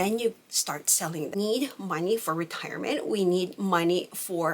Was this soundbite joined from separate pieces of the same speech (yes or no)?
yes